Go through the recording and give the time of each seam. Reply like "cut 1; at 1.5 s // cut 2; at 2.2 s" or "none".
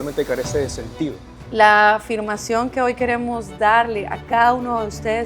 cut 1; at 1.3 s